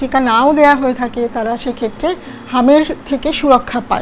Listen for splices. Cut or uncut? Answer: uncut